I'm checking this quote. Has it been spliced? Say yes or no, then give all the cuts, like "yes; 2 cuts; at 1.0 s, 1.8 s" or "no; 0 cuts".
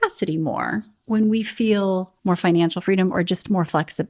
yes; 2 cuts; at 0.9 s, 2.1 s